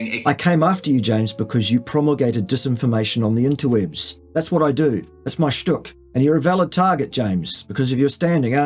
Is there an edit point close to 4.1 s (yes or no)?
no